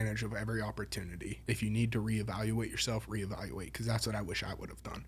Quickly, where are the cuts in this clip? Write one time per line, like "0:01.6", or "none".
0:01.4

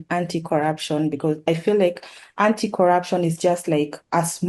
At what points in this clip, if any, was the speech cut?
none

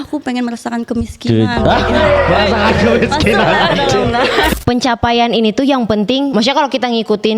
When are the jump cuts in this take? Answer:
0:04.5
0:06.3

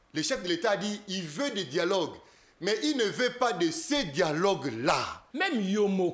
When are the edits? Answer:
0:05.2

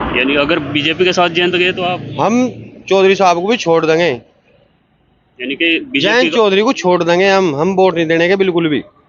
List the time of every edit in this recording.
none

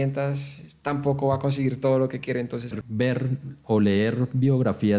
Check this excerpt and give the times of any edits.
0:02.8

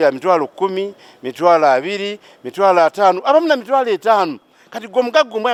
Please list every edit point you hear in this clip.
none

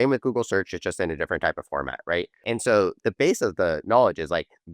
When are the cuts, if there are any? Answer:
0:02.4

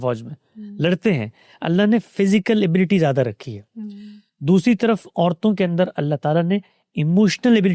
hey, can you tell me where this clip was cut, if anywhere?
none

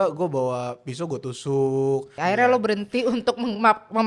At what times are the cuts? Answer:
0:02.1

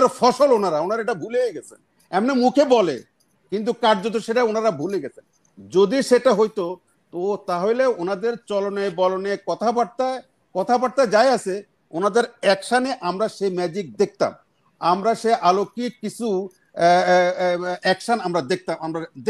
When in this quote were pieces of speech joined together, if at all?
none

